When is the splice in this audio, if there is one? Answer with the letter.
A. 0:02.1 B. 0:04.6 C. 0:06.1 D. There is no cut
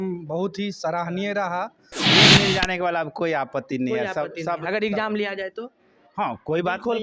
A